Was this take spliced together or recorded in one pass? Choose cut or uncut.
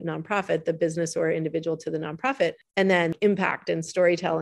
cut